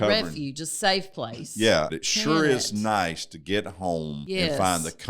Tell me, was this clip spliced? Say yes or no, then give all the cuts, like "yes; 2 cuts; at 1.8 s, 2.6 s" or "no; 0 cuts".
yes; 2 cuts; at 1.9 s, 4.2 s